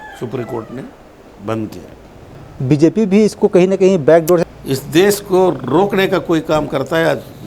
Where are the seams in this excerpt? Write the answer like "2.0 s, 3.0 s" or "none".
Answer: 2.4 s, 4.5 s